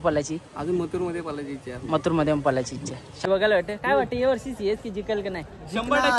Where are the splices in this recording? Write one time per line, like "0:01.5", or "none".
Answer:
0:03.2